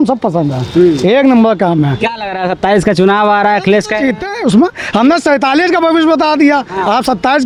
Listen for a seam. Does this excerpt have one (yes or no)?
no